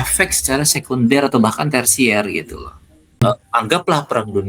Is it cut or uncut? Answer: cut